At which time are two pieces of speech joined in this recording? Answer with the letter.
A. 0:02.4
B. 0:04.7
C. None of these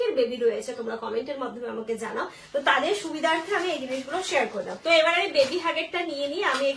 B